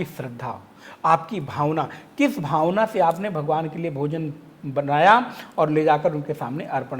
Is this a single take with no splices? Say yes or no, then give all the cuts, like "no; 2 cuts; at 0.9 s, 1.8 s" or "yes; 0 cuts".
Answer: yes; 0 cuts